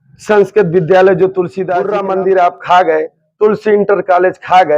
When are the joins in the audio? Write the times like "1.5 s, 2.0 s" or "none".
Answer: 1.9 s